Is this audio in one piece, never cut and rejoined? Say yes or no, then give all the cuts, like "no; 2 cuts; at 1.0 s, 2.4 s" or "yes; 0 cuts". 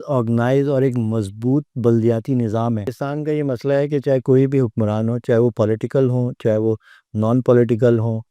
no; 1 cut; at 3.0 s